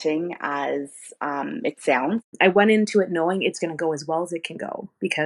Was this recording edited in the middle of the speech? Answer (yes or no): yes